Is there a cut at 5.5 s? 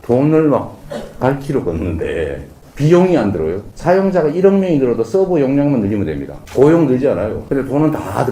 no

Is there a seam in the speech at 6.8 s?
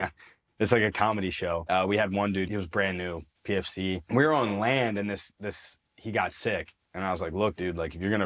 yes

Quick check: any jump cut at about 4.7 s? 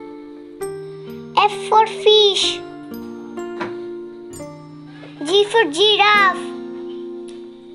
yes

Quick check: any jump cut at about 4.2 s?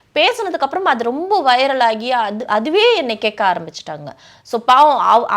no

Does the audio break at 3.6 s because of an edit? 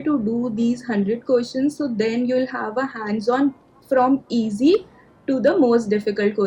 no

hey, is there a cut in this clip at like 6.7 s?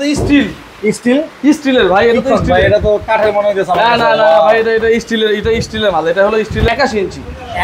yes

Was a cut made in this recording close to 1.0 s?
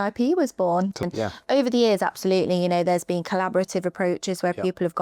yes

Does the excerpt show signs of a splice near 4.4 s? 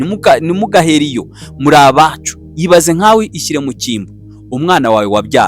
no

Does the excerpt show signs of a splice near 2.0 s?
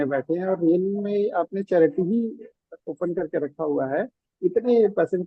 no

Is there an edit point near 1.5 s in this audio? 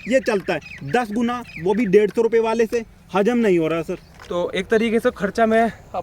no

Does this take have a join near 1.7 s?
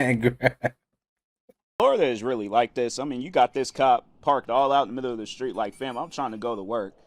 yes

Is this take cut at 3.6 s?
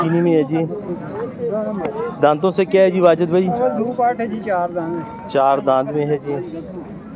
no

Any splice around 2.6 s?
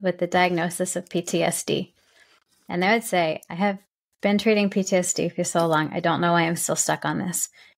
no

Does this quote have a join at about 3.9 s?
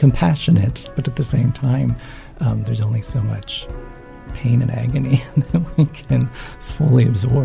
no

